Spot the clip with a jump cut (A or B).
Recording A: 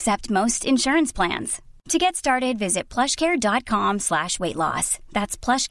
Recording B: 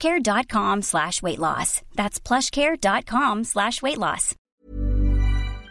B